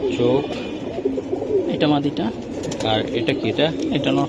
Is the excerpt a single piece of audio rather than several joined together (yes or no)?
yes